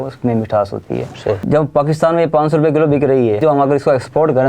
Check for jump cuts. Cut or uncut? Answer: cut